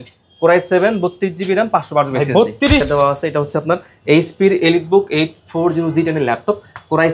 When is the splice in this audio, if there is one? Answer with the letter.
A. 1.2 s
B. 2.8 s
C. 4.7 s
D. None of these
B